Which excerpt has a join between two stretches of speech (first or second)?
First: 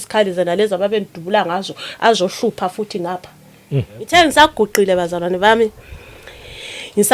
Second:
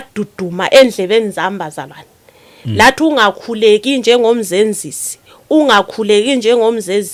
first